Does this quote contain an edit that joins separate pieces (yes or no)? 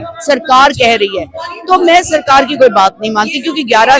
no